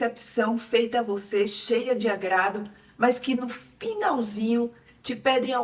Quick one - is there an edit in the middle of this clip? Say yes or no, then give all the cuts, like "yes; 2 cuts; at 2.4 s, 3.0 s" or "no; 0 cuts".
no; 0 cuts